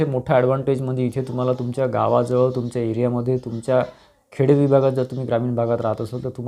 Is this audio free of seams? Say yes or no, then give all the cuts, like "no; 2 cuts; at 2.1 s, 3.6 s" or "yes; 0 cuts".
yes; 0 cuts